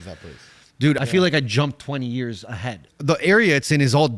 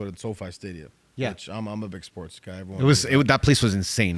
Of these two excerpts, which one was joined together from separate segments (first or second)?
first